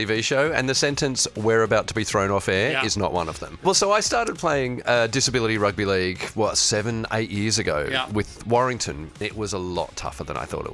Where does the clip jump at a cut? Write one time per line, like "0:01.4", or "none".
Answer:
0:03.5
0:09.2